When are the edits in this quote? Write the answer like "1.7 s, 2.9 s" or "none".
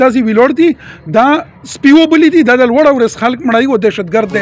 none